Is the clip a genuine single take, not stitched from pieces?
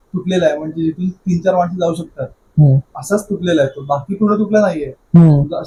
yes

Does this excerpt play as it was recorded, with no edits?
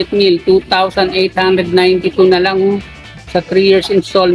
yes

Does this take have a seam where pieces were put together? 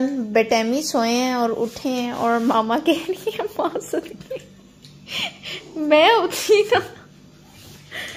no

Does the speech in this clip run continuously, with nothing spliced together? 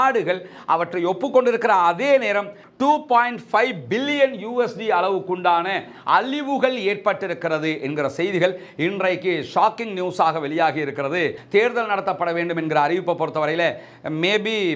no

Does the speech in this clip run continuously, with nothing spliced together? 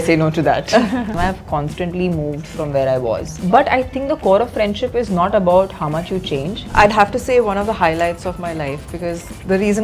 no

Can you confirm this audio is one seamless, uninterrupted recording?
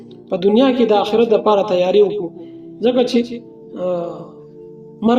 yes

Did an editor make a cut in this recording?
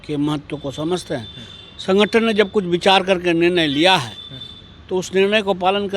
no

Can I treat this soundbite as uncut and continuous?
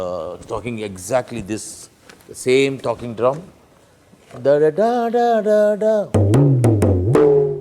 yes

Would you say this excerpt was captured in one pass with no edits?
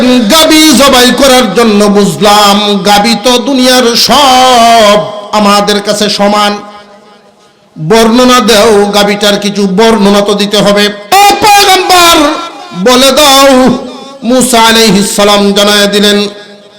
no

